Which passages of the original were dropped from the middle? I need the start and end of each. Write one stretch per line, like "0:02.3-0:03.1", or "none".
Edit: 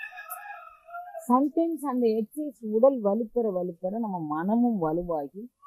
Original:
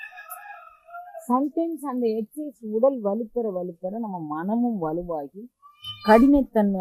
none